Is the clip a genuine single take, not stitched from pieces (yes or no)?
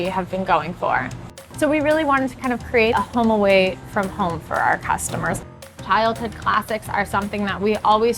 no